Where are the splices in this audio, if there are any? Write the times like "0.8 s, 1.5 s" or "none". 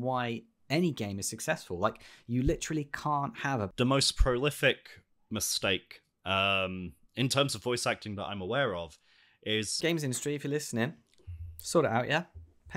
3.7 s, 9.8 s